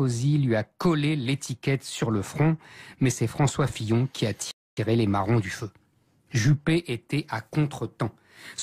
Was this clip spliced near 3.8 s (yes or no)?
yes